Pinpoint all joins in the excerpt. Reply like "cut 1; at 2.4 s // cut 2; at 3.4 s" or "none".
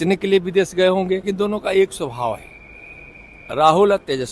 cut 1; at 1.3 s